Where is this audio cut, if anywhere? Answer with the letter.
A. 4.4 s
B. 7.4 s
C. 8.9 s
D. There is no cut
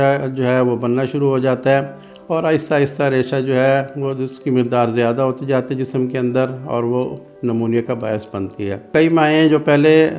C